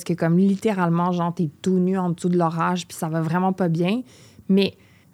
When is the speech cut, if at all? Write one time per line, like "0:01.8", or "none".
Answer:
none